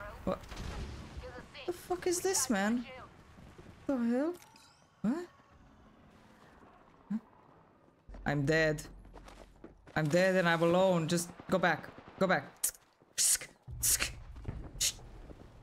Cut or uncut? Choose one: uncut